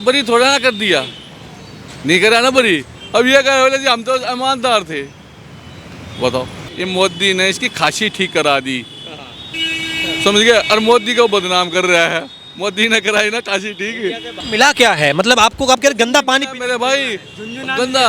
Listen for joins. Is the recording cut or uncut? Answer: cut